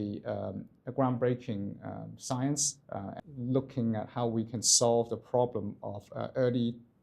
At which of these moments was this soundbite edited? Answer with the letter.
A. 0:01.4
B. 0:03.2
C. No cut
B